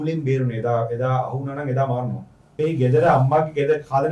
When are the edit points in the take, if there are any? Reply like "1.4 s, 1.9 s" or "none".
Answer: 2.4 s